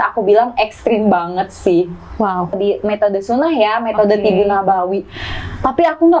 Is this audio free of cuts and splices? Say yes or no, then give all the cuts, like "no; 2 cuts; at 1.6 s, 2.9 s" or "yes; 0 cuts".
no; 1 cut; at 2.6 s